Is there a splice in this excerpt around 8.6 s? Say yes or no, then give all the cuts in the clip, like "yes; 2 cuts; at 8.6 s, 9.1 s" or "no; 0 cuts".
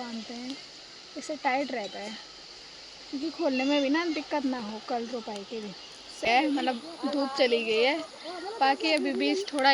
no; 1 cut; at 6.3 s